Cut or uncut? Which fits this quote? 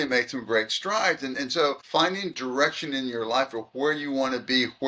cut